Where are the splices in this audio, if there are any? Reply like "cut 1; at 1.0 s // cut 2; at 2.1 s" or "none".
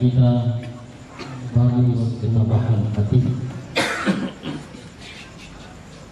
cut 1; at 2.5 s